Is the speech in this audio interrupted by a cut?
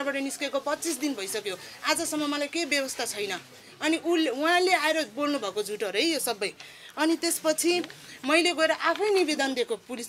no; 0 cuts

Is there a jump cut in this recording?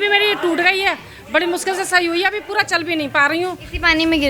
no; 0 cuts

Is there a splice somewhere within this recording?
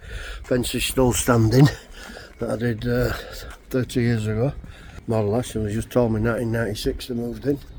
no; 0 cuts

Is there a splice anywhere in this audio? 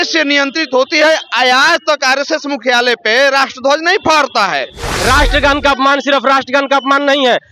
yes; 1 cut; at 4.9 s

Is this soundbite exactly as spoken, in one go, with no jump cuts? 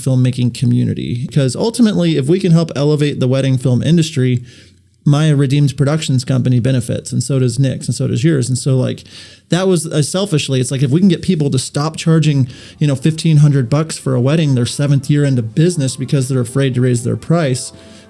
no; 1 cut; at 1.3 s

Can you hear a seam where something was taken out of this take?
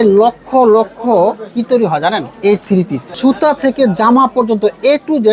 yes; 1 cut; at 2.7 s

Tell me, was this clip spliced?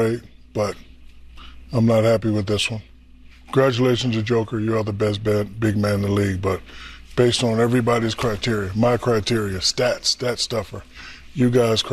no; 0 cuts

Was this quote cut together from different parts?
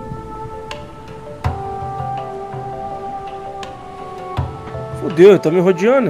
no; 0 cuts

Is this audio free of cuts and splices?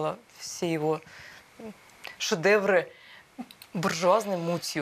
yes; 0 cuts

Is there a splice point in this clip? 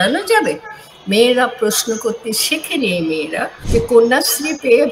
yes; 1 cut; at 3.6 s

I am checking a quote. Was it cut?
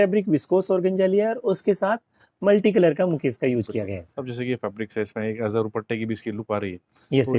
no; 0 cuts

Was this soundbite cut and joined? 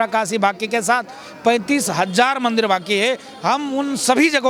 no; 0 cuts

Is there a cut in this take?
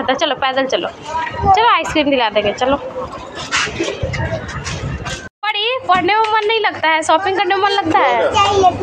yes; 1 cut; at 5.3 s

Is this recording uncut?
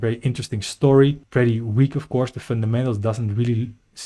no; 1 cut; at 1.2 s

